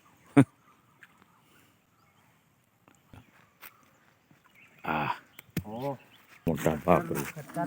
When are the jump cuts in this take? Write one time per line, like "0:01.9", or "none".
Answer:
0:03.1
0:06.5